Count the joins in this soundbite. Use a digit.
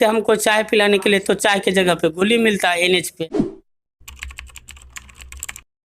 1